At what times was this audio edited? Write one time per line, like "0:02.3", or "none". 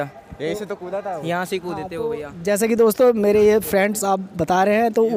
none